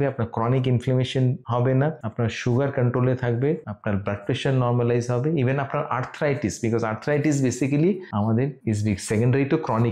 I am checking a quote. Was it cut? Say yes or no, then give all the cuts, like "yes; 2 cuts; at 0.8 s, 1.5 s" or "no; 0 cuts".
no; 0 cuts